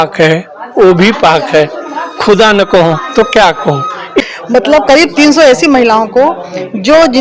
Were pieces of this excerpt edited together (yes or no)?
yes